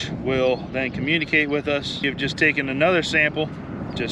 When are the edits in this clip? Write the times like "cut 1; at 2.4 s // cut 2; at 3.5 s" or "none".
cut 1; at 2.0 s